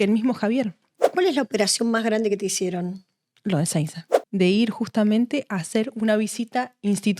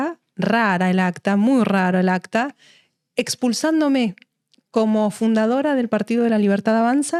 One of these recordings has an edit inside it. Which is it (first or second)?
first